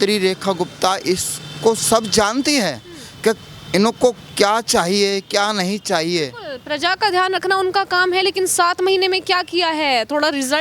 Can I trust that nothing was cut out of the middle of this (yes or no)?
yes